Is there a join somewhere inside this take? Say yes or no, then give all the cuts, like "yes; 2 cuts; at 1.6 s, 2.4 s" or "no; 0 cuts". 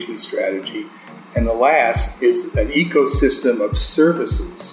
yes; 2 cuts; at 1.0 s, 2.5 s